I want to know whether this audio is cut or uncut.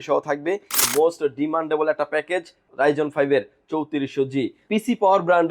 cut